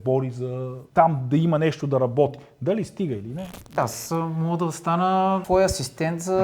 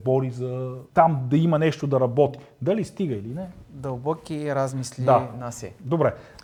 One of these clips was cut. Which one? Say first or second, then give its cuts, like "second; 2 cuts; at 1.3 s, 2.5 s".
first; 2 cuts; at 3.8 s, 5.4 s